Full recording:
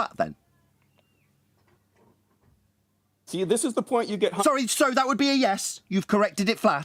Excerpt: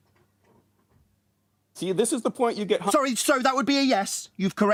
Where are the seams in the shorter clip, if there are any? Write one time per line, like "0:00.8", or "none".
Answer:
none